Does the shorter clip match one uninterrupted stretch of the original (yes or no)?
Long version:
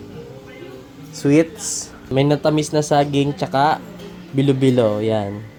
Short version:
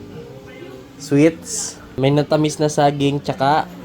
no